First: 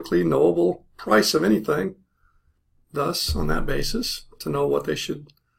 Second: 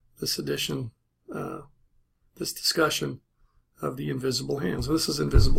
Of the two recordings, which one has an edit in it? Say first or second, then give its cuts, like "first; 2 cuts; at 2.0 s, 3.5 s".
first; 1 cut; at 3.9 s